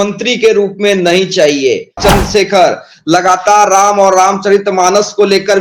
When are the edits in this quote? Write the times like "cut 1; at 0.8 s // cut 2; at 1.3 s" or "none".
cut 1; at 2.0 s